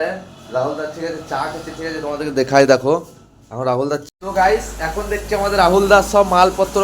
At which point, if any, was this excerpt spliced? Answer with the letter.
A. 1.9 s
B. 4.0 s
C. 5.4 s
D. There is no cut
B